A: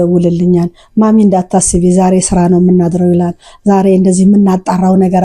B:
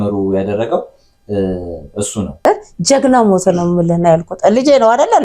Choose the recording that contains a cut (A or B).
B